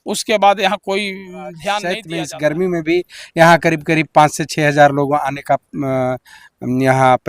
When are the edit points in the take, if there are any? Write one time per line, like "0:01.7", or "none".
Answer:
0:02.1